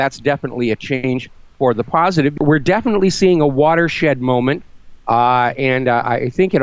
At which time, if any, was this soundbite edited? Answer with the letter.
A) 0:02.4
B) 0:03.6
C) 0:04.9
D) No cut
A